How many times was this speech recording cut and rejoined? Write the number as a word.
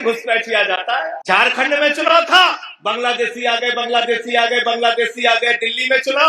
one